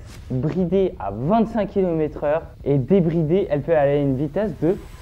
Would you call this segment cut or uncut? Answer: uncut